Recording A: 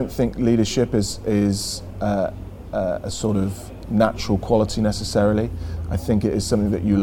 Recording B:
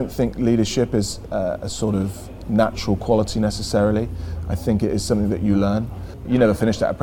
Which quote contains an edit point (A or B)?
B